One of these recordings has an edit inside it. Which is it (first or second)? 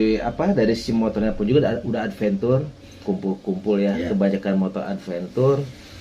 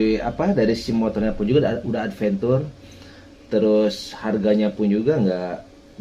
first